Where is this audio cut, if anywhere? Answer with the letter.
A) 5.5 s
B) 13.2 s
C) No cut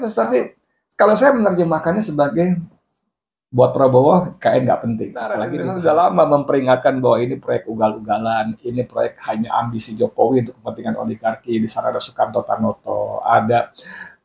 A